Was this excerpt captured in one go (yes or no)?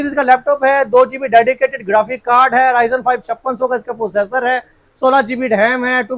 yes